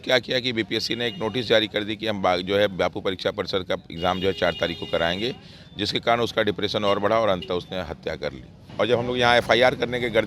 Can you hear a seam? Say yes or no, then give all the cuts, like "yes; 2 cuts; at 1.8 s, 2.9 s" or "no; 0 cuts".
yes; 1 cut; at 8.7 s